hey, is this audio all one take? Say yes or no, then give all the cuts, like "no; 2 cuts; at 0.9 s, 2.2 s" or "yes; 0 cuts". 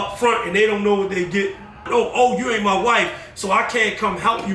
no; 1 cut; at 1.8 s